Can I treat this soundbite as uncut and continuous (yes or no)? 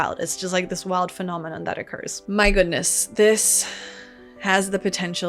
no